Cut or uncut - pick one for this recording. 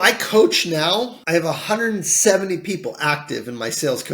cut